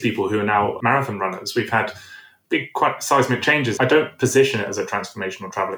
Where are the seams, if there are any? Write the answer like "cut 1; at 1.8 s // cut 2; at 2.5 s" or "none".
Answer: cut 1; at 0.8 s // cut 2; at 2.4 s // cut 3; at 3.7 s